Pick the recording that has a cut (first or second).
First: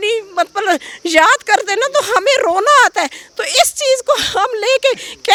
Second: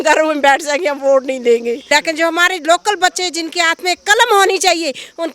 second